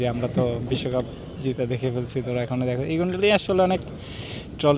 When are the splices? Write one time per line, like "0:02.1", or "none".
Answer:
none